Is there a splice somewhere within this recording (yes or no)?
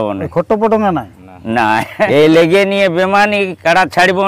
yes